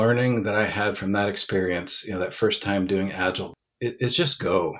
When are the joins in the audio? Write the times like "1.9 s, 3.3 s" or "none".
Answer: 3.5 s